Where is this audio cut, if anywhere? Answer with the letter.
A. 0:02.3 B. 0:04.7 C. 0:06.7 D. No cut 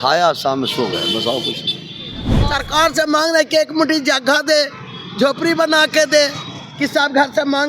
A